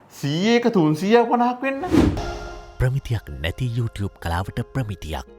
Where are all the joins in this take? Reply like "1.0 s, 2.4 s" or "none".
2.1 s

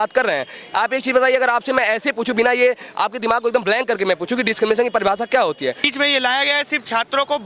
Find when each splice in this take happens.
5.9 s

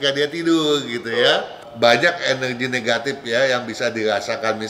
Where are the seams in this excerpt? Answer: 1.6 s

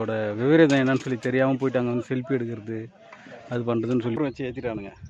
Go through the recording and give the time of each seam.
4.2 s

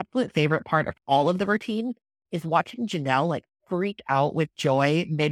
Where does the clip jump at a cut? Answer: 1.0 s

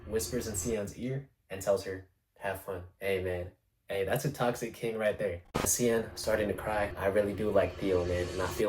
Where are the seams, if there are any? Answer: 5.6 s, 6.9 s

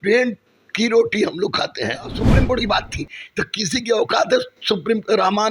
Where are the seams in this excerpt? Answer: 2.2 s

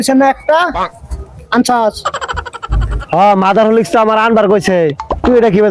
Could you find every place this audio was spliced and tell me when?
none

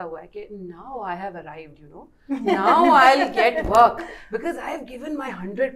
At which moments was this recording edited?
none

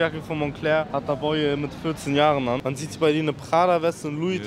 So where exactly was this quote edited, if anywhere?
0.9 s, 2.6 s

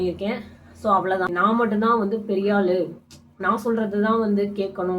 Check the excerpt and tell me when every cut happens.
1.3 s

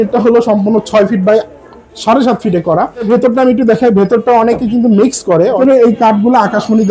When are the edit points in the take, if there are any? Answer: 3.1 s, 5.6 s

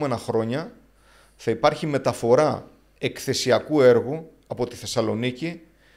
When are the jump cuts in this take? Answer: none

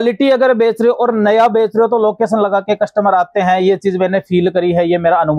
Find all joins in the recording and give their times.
none

